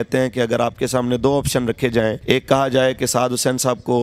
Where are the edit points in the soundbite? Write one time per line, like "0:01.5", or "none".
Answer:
0:02.2